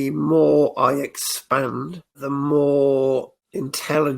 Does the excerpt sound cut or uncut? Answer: cut